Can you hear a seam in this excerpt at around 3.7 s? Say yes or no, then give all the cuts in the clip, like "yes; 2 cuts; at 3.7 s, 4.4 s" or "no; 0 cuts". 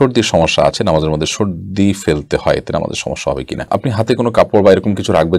no; 0 cuts